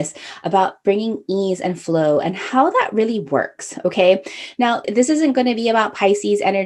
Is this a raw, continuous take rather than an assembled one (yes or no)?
no